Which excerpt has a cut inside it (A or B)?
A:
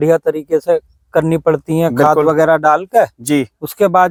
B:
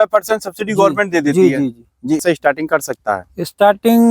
B